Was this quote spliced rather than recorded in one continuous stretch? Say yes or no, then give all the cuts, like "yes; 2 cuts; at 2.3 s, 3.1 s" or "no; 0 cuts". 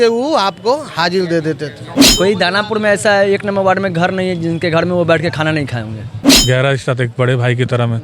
yes; 2 cuts; at 2.0 s, 6.3 s